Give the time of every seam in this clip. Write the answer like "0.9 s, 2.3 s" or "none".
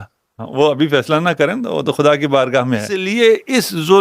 3.1 s